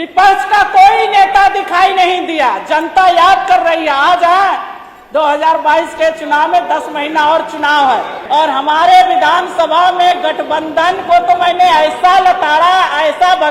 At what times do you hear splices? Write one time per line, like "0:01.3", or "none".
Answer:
0:08.2